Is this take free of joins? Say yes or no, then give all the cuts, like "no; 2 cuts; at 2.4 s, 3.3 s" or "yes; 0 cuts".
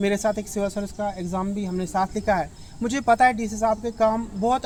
yes; 0 cuts